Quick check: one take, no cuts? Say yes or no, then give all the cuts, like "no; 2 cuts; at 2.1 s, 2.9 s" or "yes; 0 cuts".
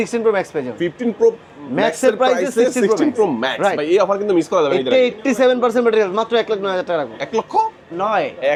yes; 0 cuts